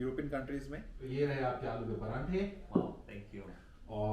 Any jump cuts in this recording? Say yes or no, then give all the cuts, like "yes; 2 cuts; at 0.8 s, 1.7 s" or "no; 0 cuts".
yes; 1 cut; at 1.0 s